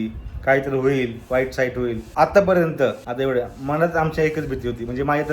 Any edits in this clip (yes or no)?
yes